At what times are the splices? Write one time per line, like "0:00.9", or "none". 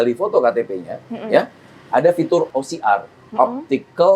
0:02.5